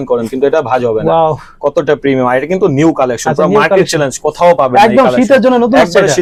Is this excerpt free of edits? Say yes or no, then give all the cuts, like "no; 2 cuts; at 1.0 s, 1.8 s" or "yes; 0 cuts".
yes; 0 cuts